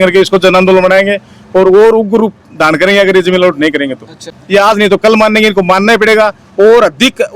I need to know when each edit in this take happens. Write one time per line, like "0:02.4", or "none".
0:04.3